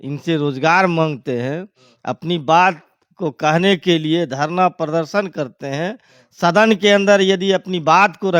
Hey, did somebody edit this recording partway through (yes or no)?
no